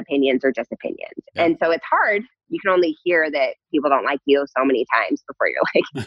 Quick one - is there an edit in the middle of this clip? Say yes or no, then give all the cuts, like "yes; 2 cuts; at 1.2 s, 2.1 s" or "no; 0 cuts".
no; 0 cuts